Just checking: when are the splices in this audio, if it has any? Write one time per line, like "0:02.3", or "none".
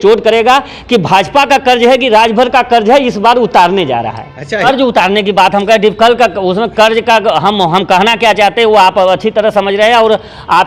0:04.6